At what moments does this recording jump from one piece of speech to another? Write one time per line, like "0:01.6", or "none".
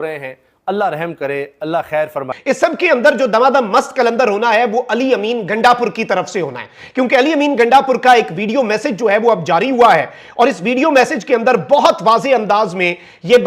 0:02.2